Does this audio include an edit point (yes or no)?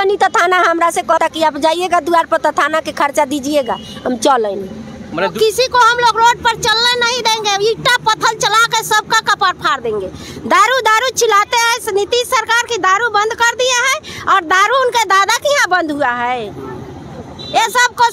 yes